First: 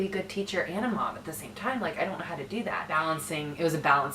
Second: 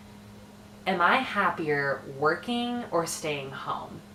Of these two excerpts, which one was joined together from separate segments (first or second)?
first